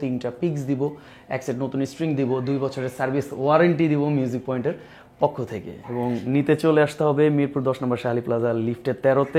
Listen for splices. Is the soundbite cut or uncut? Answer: uncut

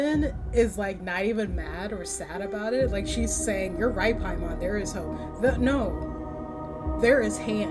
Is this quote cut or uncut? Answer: uncut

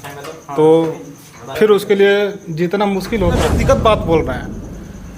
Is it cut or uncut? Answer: cut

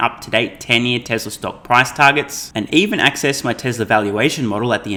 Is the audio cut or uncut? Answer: uncut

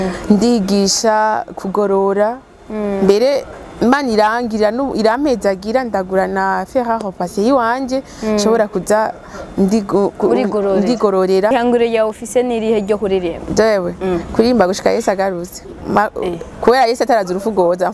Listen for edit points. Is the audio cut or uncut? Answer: cut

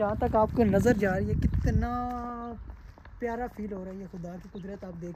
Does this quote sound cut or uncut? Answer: uncut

